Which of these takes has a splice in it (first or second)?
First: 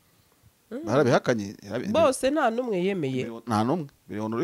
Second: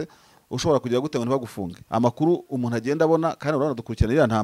second